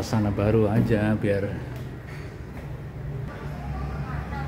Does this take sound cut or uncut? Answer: cut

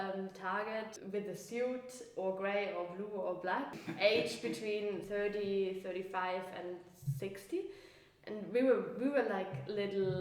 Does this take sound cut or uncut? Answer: cut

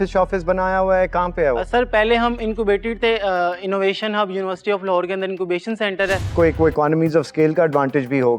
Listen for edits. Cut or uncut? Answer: cut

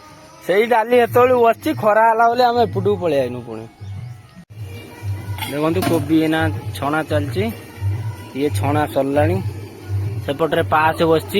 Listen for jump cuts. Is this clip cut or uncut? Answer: cut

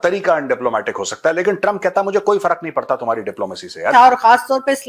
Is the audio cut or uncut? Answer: cut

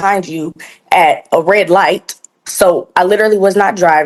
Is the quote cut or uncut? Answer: uncut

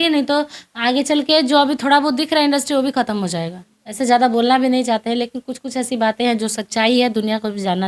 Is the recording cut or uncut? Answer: cut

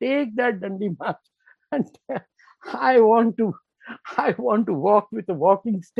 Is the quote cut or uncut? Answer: uncut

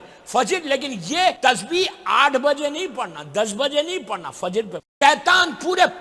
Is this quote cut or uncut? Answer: cut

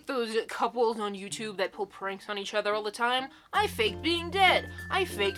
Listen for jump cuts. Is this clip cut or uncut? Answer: uncut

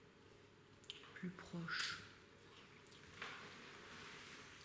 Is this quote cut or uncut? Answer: uncut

